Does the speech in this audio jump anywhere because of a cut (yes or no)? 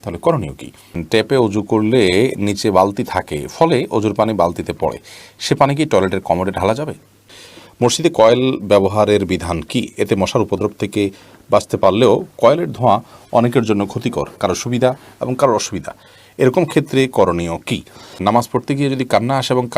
yes